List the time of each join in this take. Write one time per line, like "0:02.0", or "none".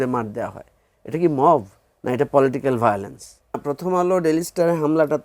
0:03.7